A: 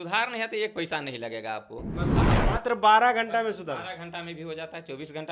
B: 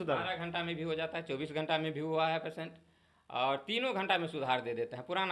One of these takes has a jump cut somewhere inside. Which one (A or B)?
A